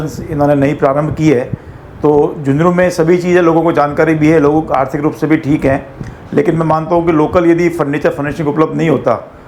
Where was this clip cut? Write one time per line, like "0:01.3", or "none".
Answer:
none